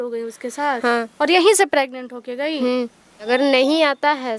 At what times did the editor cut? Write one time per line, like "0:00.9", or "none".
0:03.3